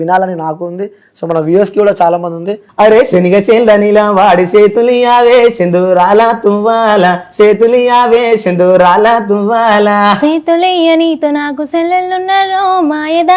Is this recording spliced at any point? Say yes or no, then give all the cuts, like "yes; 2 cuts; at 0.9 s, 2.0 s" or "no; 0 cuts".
yes; 1 cut; at 2.6 s